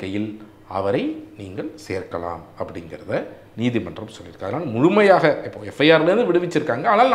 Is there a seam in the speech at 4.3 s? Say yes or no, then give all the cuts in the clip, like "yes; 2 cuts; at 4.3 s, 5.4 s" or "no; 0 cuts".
no; 0 cuts